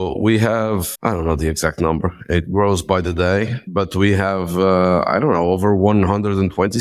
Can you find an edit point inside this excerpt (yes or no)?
yes